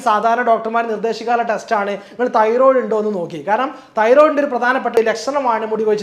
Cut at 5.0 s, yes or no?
yes